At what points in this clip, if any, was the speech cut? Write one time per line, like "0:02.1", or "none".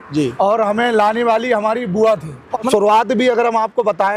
0:02.7